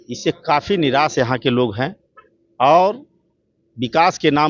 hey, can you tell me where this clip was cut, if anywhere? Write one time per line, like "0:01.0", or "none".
none